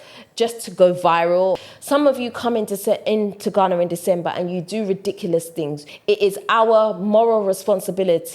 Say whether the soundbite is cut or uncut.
cut